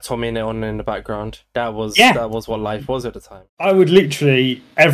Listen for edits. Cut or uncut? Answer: cut